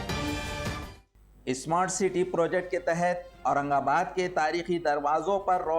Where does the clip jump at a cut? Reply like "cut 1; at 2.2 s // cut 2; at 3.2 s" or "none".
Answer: cut 1; at 1.0 s